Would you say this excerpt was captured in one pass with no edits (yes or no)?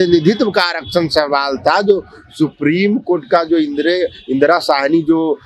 yes